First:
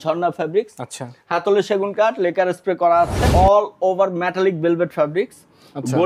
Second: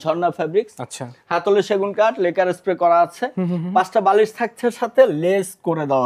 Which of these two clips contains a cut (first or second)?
first